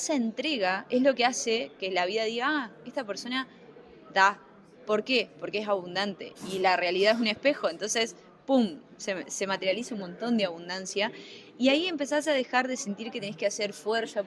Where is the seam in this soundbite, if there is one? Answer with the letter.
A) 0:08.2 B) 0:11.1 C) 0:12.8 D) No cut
D